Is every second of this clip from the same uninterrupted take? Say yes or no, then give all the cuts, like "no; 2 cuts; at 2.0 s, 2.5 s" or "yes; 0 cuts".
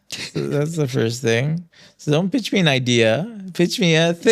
yes; 0 cuts